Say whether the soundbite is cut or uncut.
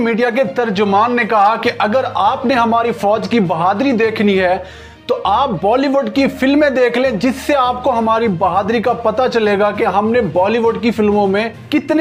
uncut